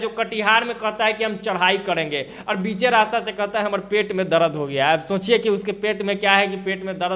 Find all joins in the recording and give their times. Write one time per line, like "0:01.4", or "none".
none